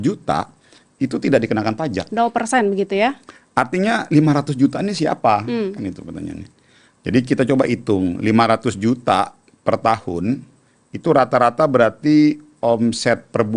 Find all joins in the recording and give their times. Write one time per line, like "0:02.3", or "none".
none